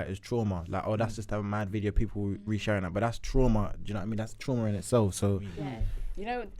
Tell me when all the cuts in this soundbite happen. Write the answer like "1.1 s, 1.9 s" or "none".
5.6 s